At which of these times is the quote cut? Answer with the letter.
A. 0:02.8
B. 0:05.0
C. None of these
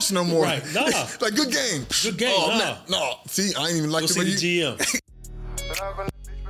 B